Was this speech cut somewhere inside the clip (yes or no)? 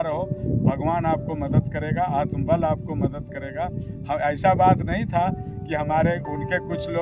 no